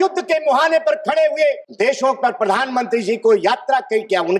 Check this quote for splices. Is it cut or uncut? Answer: cut